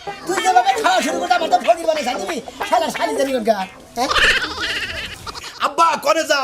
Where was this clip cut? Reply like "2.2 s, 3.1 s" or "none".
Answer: 5.5 s